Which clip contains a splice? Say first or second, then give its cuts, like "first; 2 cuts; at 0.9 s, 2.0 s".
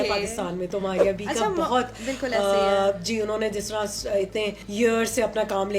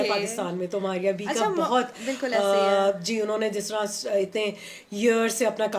first; 1 cut; at 4.6 s